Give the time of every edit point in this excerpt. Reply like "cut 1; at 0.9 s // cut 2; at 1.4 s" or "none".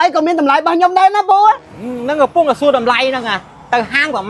none